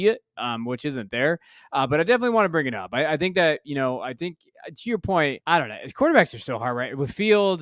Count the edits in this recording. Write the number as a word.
one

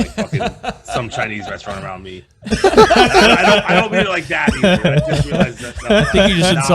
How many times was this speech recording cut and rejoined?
zero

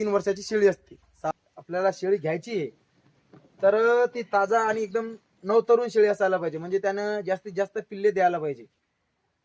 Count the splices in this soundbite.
one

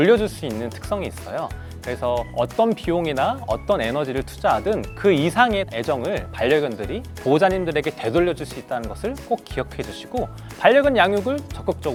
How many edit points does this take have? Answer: zero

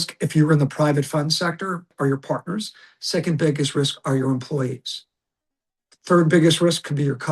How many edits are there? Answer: one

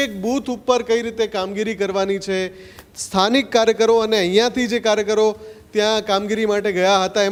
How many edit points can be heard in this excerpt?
zero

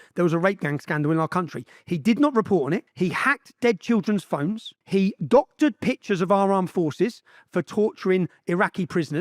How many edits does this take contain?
two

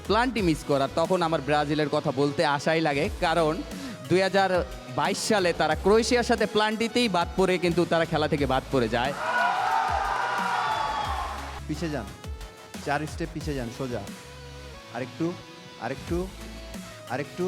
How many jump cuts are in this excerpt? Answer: one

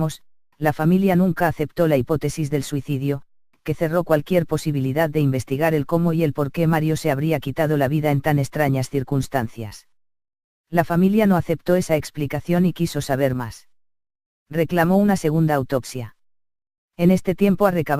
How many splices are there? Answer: one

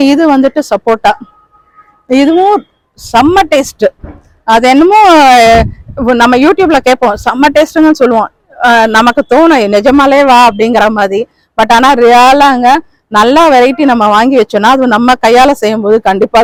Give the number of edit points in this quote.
zero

